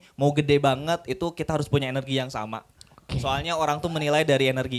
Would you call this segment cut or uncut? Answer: uncut